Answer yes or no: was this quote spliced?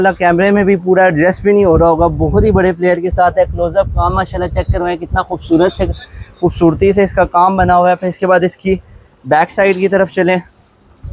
no